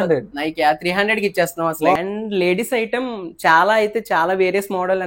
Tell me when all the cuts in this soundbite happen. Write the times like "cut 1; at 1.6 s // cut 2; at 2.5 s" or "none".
none